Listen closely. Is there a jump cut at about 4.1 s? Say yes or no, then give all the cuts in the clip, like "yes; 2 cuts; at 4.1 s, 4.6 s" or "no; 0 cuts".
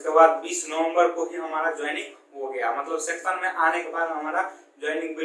no; 0 cuts